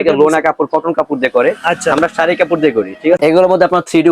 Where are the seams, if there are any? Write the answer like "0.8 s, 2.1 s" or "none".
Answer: 3.2 s

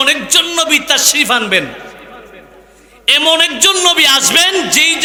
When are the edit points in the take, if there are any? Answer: none

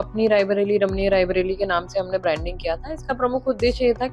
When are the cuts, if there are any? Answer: none

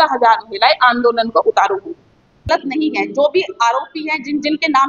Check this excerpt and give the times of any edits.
2.5 s

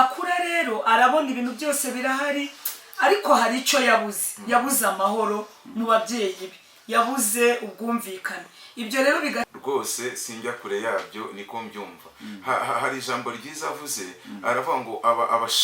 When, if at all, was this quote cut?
9.5 s

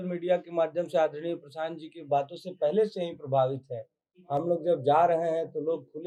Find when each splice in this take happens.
none

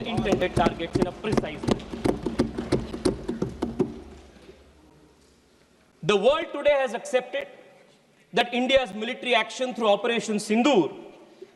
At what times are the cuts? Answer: none

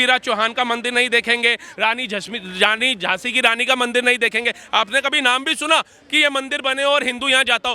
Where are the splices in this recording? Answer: none

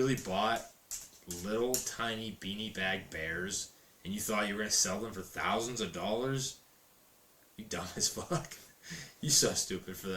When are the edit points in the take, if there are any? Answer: none

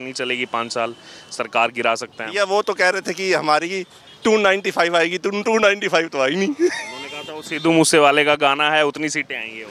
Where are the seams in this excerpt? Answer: none

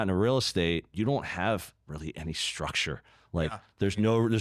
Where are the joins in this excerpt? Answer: 0.9 s

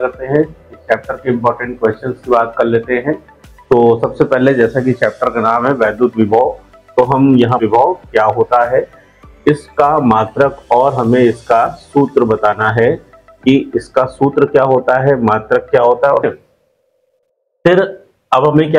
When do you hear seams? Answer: 7.6 s, 16.2 s

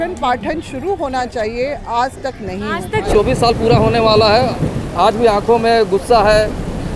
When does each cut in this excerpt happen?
3.1 s

